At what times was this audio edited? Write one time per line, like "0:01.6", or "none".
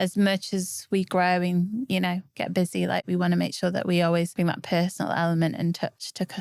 0:04.3